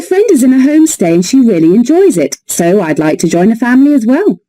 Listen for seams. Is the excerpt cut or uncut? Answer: cut